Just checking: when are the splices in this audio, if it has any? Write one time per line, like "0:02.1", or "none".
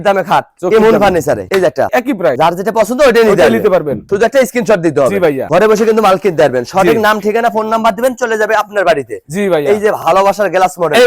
none